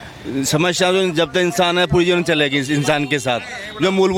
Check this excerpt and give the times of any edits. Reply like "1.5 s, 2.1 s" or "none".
none